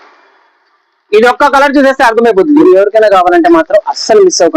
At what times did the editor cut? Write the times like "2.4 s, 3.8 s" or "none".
2.6 s